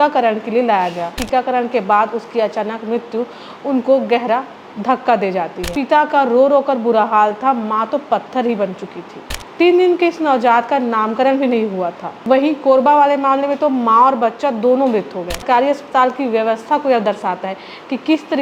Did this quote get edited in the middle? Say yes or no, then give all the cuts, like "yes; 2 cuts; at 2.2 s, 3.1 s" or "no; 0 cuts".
yes; 4 cuts; at 1.1 s, 5.6 s, 12.1 s, 15.4 s